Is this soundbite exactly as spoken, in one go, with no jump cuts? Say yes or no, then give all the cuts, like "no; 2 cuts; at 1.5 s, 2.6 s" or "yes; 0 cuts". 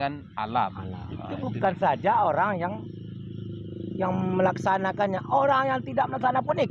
yes; 0 cuts